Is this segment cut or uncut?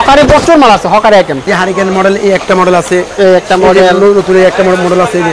cut